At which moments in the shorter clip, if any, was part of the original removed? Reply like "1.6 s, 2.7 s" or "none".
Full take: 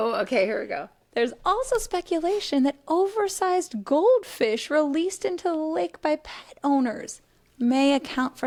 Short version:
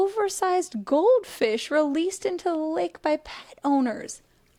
none